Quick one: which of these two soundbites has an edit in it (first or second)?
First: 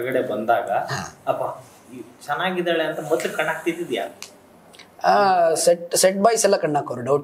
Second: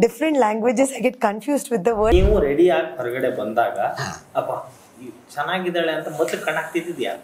second